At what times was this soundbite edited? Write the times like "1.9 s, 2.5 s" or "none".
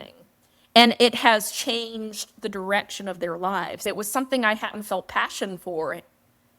3.8 s